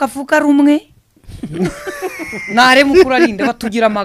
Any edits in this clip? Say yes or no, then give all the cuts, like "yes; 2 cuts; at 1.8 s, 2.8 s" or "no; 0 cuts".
no; 0 cuts